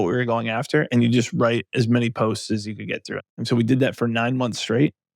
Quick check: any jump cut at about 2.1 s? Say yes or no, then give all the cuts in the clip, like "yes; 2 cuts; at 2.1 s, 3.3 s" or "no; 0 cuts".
no; 1 cut; at 3.3 s